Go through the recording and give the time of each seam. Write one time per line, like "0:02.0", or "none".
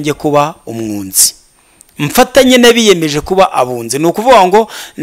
none

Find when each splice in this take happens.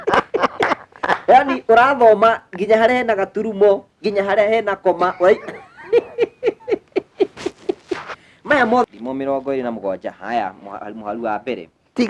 0:08.8

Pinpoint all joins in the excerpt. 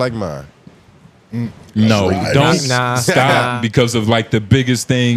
0:03.5

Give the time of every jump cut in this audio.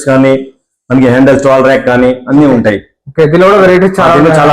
none

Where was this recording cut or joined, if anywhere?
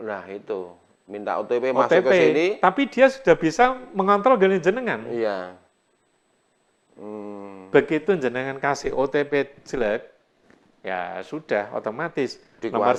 none

